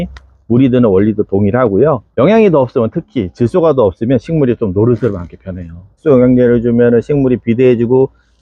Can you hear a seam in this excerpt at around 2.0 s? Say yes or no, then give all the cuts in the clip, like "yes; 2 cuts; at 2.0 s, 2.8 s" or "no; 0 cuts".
yes; 2 cuts; at 2.0 s, 5.9 s